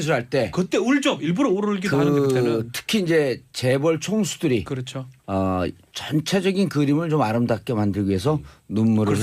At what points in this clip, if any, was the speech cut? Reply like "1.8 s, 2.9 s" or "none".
7.4 s